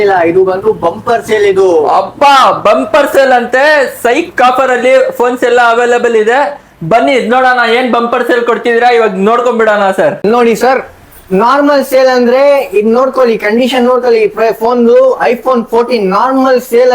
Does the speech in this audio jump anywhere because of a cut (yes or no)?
no